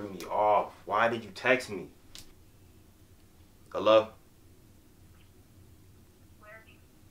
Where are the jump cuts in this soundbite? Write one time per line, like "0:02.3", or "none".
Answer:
0:02.3